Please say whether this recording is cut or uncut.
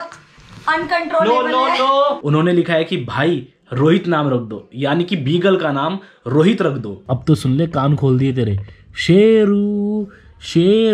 cut